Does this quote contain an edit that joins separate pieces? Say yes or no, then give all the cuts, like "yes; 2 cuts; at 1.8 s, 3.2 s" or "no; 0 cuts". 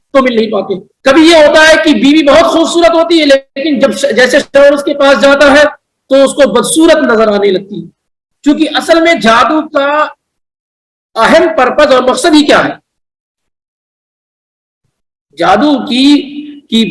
yes; 1 cut; at 8.1 s